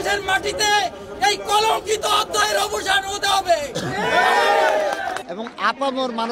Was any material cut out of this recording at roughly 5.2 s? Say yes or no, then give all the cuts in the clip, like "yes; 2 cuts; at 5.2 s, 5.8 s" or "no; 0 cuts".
yes; 1 cut; at 5.2 s